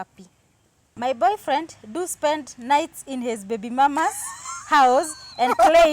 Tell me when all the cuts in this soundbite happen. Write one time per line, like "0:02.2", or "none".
0:00.9